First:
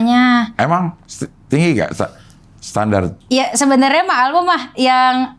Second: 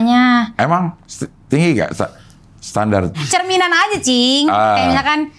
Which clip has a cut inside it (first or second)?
second